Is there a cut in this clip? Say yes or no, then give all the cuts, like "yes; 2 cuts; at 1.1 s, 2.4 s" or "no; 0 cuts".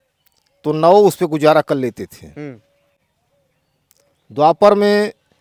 no; 0 cuts